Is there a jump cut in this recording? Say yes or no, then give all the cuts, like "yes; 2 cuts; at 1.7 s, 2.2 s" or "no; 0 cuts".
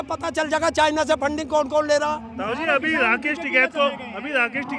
no; 0 cuts